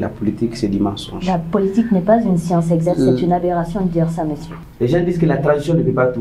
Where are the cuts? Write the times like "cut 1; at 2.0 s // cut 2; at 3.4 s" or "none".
cut 1; at 4.6 s

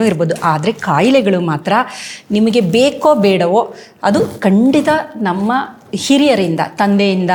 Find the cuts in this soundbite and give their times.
none

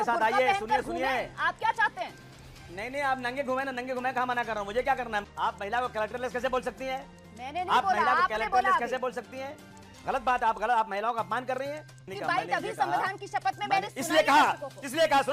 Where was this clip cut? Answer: cut 1; at 5.2 s // cut 2; at 12.1 s

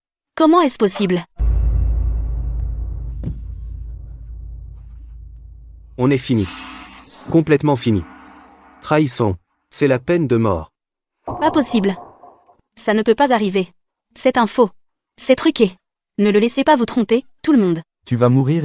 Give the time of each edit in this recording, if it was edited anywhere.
cut 1; at 1.3 s

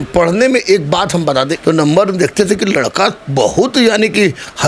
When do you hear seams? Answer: cut 1; at 1.5 s

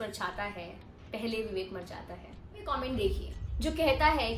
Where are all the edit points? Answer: cut 1; at 2.6 s

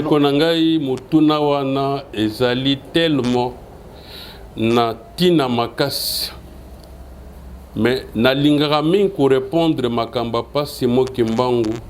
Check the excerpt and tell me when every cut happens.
none

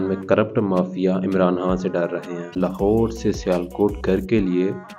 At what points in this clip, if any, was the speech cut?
cut 1; at 2.6 s

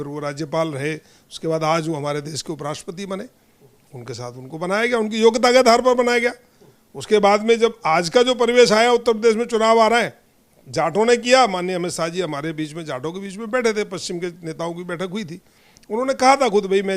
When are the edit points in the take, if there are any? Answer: none

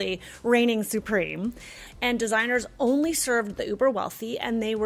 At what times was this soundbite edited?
cut 1; at 1.8 s

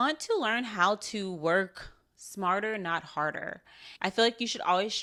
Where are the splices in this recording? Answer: none

